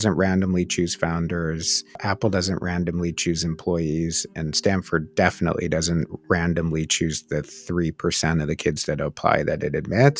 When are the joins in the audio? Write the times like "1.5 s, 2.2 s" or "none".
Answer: 2.0 s